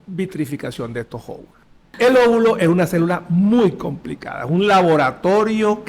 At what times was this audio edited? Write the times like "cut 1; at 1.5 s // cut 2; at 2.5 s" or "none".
cut 1; at 1.8 s